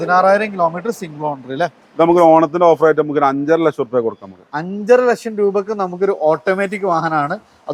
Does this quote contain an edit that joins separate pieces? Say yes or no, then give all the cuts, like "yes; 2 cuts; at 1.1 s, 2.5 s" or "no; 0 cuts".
no; 0 cuts